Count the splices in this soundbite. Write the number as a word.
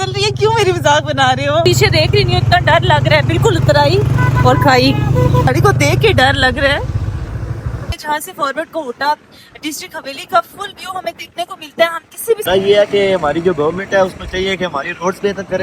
four